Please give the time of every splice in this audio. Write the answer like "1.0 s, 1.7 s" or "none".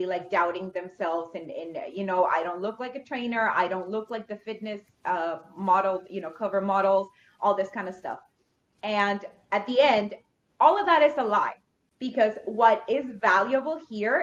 none